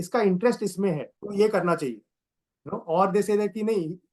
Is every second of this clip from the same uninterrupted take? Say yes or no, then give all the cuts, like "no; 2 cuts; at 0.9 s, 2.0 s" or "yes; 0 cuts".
no; 1 cut; at 1.1 s